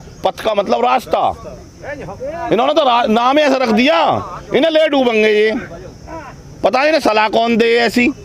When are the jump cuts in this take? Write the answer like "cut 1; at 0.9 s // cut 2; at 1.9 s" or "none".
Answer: none

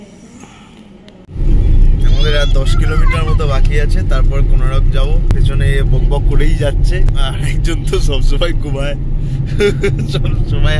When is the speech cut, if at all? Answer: cut 1; at 1.2 s // cut 2; at 5.3 s // cut 3; at 7.1 s

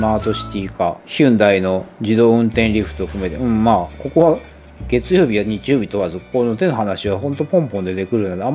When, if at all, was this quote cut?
none

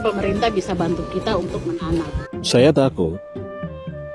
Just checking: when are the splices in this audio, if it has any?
cut 1; at 2.2 s

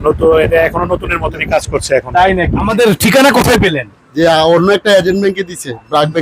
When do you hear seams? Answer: cut 1; at 2.7 s

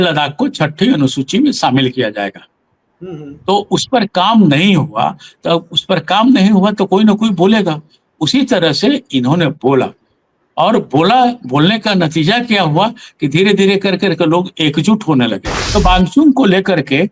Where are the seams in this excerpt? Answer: cut 1; at 15.6 s

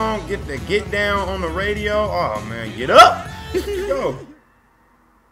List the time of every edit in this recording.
cut 1; at 3.8 s

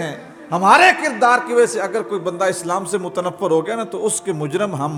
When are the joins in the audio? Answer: none

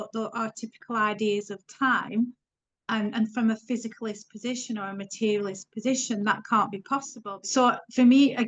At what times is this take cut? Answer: cut 1; at 7.2 s

